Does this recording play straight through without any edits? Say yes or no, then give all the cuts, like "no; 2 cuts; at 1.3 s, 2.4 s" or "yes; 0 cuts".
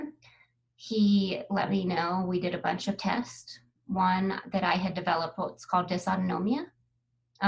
yes; 0 cuts